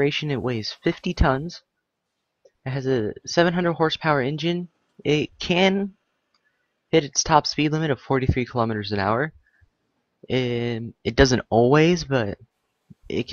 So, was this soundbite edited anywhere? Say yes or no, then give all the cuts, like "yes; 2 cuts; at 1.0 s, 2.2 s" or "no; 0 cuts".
yes; 1 cut; at 1.8 s